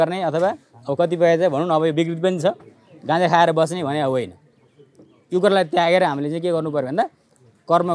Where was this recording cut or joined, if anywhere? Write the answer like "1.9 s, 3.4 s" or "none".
none

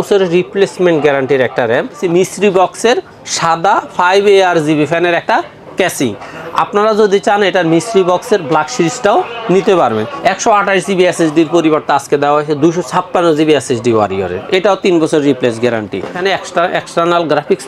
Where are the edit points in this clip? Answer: 2.0 s, 10.1 s, 16.2 s

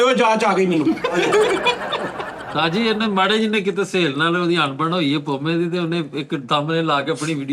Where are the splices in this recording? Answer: 2.4 s

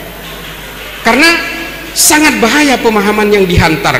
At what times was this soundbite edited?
none

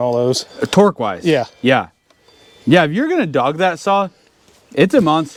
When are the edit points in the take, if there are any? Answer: none

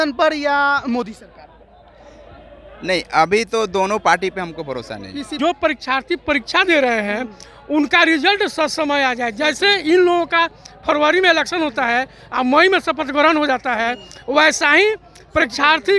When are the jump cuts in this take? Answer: 5.4 s

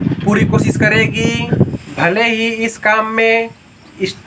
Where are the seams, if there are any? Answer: 1.8 s

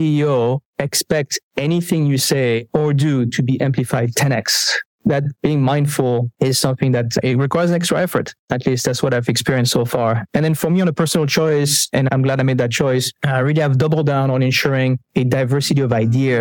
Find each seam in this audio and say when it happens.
13.2 s, 15.0 s

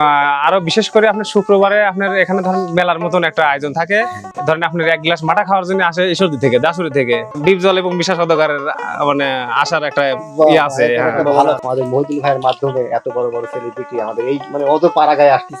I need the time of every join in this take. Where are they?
4.2 s, 7.3 s, 11.6 s

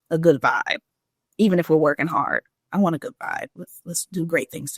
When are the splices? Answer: none

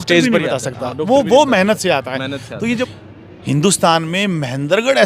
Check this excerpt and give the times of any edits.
2.9 s

